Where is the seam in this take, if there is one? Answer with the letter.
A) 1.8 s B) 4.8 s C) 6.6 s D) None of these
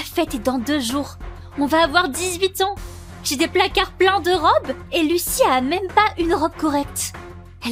D